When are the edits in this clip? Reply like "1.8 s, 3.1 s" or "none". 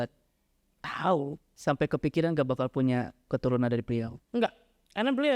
1.5 s, 4.2 s